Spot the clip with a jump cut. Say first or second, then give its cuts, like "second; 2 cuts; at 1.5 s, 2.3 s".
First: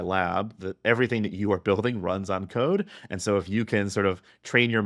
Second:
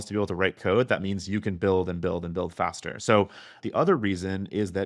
second; 1 cut; at 3.5 s